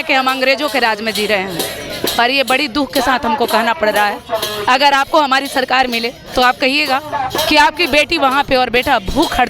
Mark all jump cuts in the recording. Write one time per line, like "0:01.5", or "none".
none